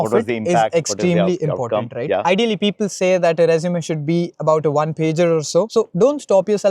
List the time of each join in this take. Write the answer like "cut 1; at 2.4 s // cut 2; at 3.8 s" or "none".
cut 1; at 2.2 s // cut 2; at 5.7 s